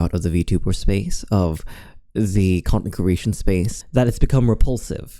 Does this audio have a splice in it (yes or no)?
yes